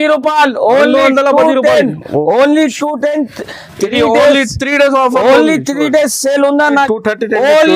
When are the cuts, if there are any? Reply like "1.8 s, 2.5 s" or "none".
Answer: 6.9 s